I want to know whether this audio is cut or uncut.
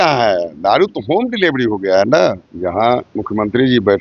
cut